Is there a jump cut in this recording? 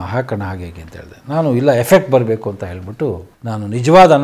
yes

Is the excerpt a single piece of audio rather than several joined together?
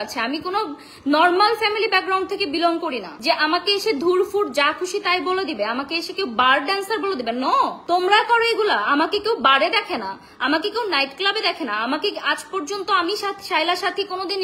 no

